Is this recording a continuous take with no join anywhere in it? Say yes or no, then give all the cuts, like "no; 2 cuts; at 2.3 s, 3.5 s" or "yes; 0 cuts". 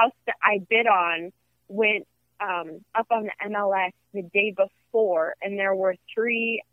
yes; 0 cuts